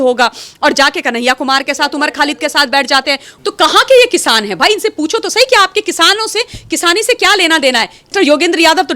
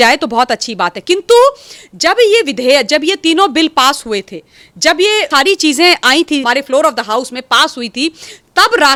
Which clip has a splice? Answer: first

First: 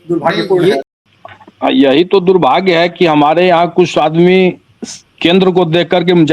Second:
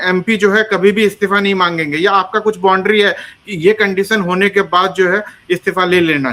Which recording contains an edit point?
first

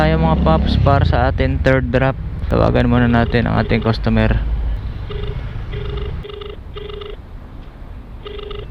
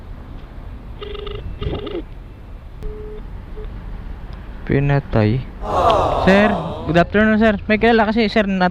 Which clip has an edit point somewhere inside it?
first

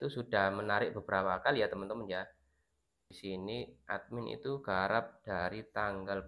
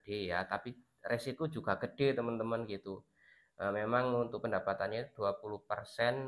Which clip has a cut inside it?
first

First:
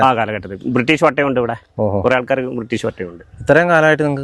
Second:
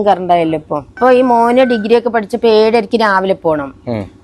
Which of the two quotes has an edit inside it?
second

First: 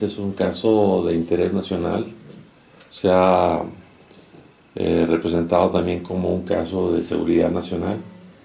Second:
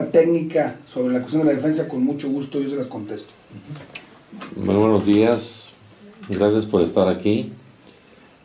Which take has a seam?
first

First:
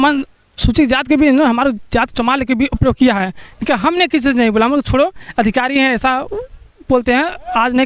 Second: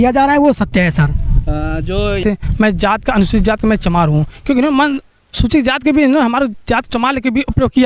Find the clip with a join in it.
second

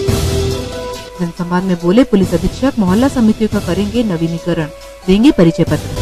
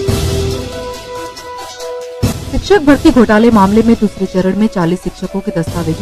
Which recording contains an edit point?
second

